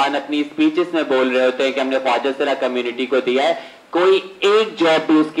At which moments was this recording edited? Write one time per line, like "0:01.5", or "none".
none